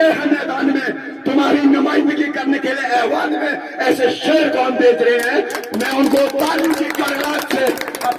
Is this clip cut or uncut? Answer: uncut